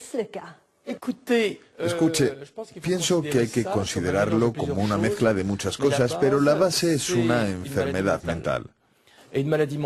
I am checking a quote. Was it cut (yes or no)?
yes